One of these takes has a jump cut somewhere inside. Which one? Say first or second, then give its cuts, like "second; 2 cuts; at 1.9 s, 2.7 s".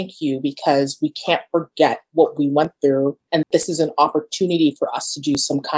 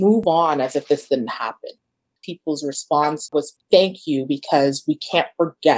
second; 1 cut; at 2.1 s